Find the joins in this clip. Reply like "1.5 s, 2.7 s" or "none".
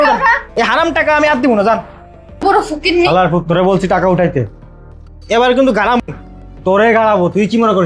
2.4 s

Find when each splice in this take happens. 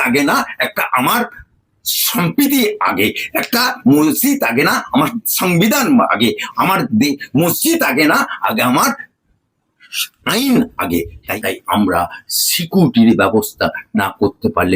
11.2 s

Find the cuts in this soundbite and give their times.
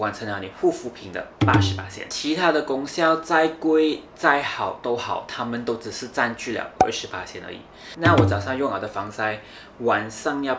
7.9 s

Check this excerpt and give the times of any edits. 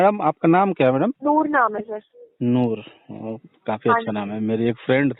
1.2 s

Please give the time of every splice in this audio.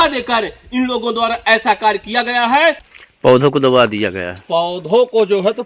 2.8 s

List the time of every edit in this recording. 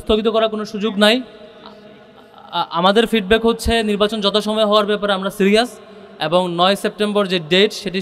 none

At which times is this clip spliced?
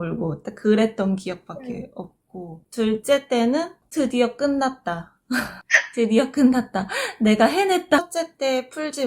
8.0 s

